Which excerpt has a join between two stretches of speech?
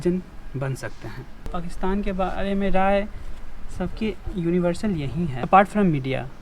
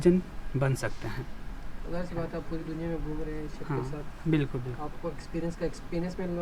first; 2 cuts; at 1.5 s, 5.4 s

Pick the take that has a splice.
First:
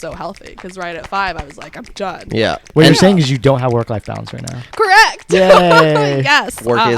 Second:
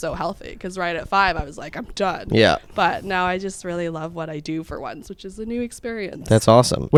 first; 1 cut; at 2.6 s

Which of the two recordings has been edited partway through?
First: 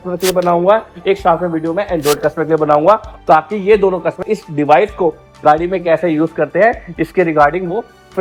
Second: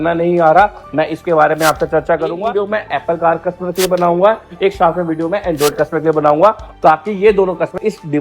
second; 1 cut; at 2.4 s

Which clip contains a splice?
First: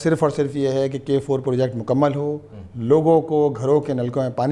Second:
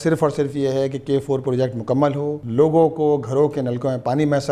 second; 1 cut; at 2.4 s

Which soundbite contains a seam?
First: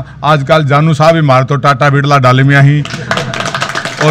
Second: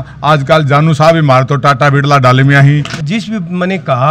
second; 1 cut; at 2.9 s

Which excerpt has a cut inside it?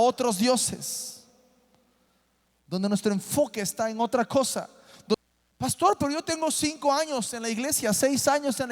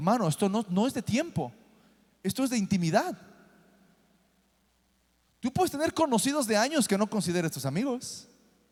first; 1 cut; at 5.1 s

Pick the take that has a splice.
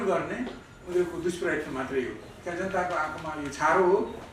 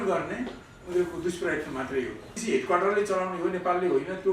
second; 1 cut; at 2.3 s

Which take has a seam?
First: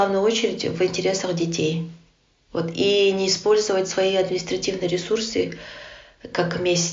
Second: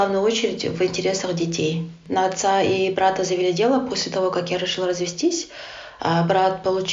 second; 1 cut; at 2.0 s

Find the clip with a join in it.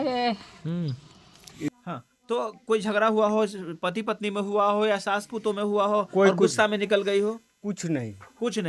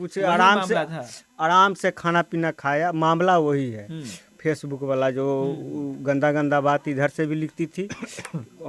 first; 1 cut; at 1.8 s

